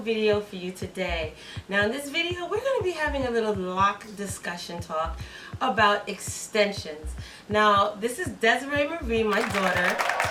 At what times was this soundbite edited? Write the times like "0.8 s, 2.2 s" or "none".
none